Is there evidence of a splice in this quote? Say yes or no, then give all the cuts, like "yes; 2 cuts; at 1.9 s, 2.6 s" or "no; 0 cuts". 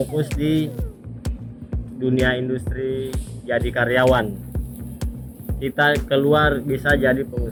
no; 0 cuts